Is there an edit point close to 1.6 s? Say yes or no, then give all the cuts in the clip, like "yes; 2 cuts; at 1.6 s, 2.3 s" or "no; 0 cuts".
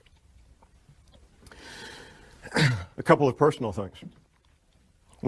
yes; 1 cut; at 1.6 s